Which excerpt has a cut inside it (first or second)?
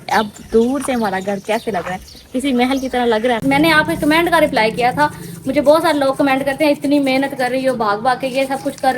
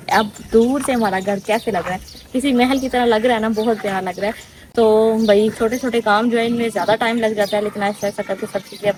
first